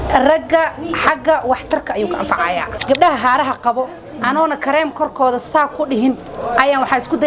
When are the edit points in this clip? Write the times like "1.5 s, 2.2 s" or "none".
2.7 s